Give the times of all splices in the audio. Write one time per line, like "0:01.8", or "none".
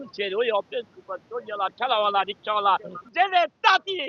none